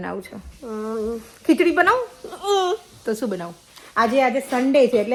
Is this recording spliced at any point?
no; 0 cuts

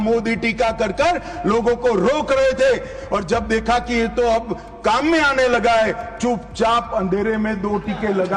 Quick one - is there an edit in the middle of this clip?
no; 0 cuts

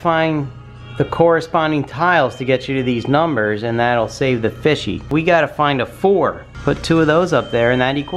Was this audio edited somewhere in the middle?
no; 0 cuts

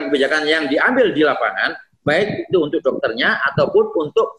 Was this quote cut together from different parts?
no; 0 cuts

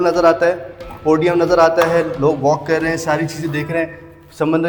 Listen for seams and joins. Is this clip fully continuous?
yes; 0 cuts

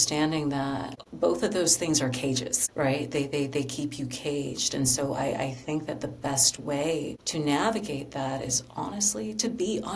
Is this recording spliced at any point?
yes; 3 cuts; at 1.0 s, 2.5 s, 7.2 s

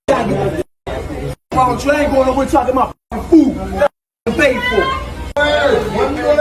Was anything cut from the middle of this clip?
yes; 1 cut; at 5.4 s

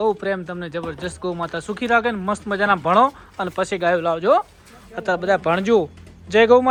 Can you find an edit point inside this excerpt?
no; 0 cuts

